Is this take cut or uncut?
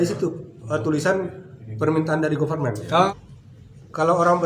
cut